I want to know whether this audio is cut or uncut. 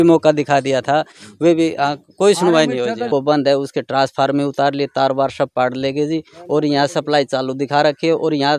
cut